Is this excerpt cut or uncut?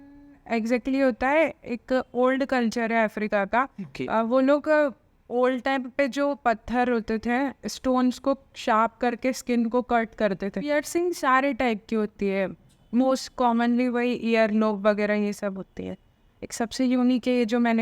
cut